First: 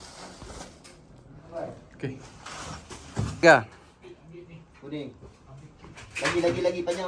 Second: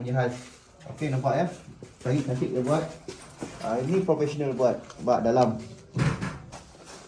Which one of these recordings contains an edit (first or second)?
first